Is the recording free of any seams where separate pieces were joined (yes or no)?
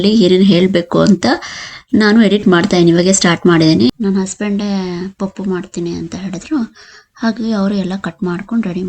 no